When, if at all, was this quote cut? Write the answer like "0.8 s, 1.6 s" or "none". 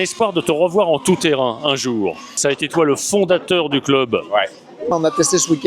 2.3 s, 4.9 s